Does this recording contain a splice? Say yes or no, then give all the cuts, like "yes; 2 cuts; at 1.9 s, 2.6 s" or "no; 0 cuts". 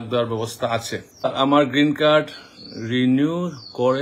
yes; 1 cut; at 1.3 s